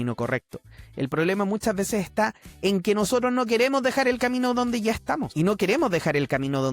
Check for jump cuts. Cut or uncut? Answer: cut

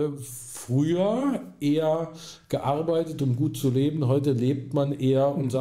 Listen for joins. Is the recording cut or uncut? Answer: uncut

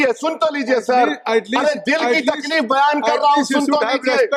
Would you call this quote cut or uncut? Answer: uncut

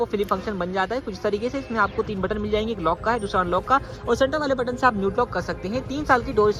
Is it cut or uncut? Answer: uncut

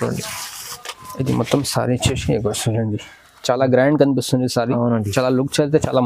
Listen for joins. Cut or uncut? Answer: uncut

